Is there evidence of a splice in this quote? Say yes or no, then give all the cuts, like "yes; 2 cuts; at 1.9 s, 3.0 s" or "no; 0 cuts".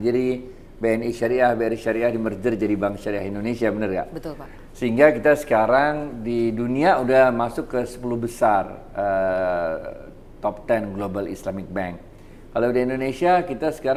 no; 0 cuts